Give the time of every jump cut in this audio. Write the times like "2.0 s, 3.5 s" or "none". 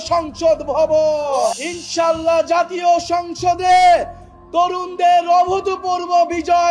1.6 s